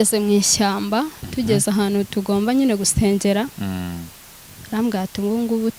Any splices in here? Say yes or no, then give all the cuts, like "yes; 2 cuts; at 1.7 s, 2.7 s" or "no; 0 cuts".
no; 0 cuts